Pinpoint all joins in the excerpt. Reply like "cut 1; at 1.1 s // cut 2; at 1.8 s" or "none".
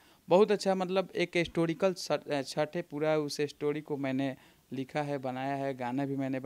none